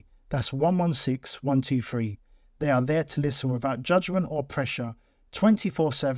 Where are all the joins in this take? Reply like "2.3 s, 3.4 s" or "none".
none